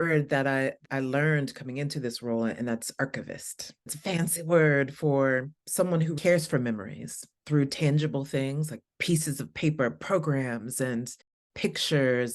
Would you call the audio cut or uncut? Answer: cut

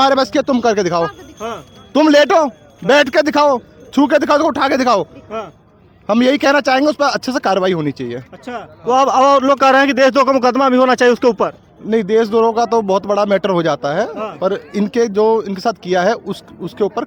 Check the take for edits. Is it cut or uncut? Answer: uncut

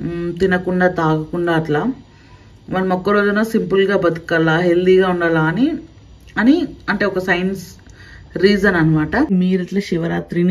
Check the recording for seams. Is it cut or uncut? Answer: cut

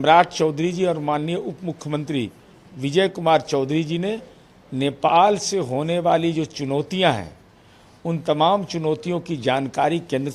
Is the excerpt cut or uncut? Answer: uncut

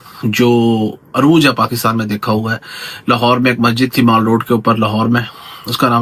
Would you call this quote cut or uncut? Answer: uncut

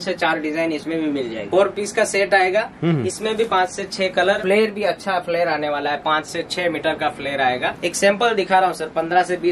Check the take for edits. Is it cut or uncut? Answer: cut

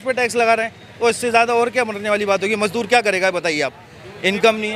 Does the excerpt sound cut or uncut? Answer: uncut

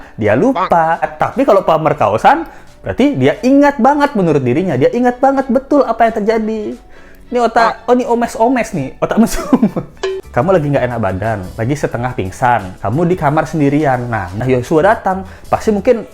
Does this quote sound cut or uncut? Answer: cut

